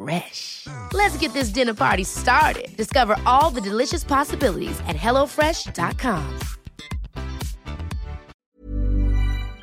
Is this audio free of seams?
no; 1 cut; at 8.3 s

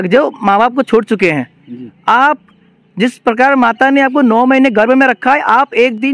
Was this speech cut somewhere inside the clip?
no; 0 cuts

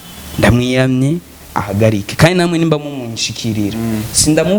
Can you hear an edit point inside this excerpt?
no; 0 cuts

